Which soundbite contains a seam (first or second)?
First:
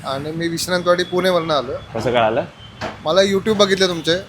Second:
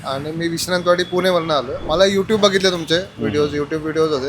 second